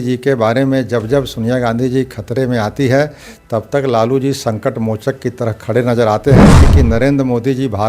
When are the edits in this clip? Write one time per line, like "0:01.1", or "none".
0:06.7

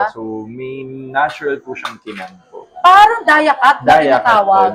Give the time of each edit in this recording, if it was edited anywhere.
none

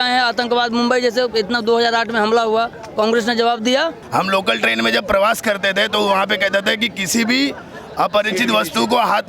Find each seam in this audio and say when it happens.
0:04.0

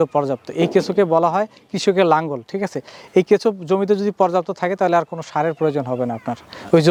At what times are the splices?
none

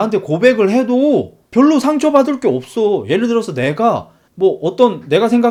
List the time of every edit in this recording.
none

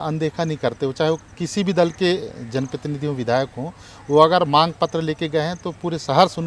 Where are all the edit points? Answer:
none

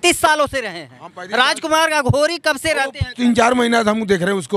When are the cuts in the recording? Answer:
none

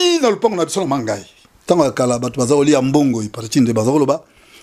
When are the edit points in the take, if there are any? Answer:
0:01.5

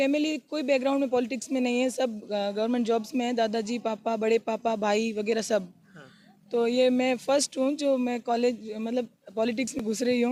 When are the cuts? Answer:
none

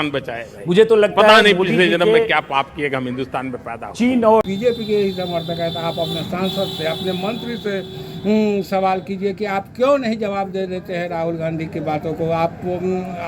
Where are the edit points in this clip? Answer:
0:04.4

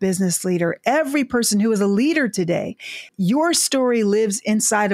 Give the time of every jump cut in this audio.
0:03.0

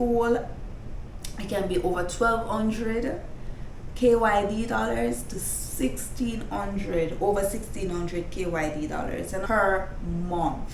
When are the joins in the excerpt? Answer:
0:09.4

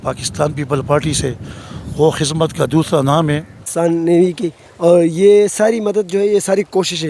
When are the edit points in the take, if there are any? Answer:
0:03.6

